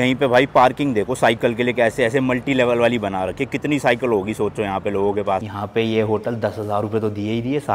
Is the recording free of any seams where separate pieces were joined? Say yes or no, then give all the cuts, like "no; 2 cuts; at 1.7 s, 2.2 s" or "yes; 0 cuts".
no; 1 cut; at 5.5 s